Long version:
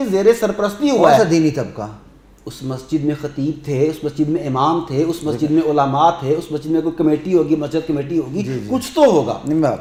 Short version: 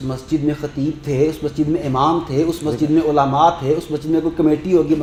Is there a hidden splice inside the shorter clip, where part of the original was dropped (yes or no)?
no